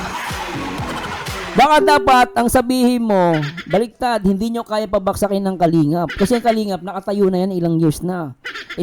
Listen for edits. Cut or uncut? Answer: cut